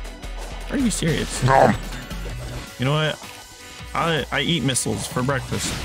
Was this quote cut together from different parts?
no; 0 cuts

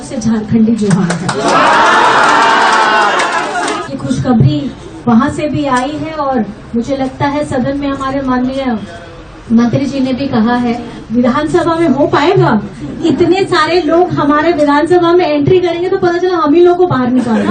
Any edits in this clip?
yes; 2 cuts; at 3.8 s, 10.9 s

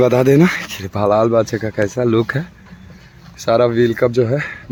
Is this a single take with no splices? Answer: yes; 0 cuts

